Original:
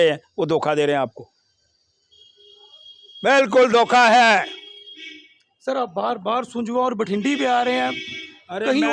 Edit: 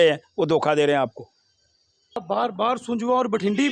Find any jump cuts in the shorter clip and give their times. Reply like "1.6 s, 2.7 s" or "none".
2.2 s